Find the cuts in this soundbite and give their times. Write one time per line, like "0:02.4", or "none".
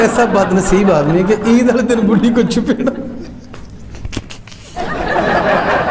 0:04.6